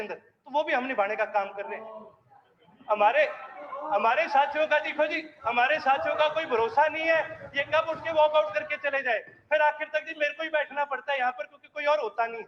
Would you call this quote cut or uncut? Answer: uncut